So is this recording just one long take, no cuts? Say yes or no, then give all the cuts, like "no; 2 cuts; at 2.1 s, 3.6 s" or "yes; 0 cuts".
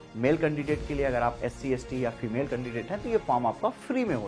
yes; 0 cuts